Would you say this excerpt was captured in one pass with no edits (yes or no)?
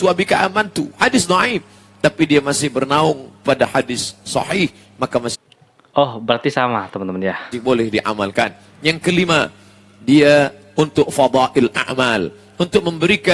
yes